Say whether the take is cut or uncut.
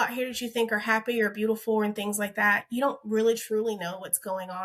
uncut